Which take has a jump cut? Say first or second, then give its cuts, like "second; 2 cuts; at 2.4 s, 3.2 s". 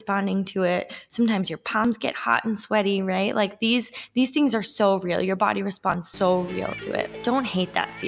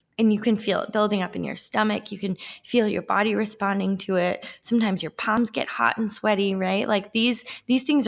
first; 1 cut; at 7.1 s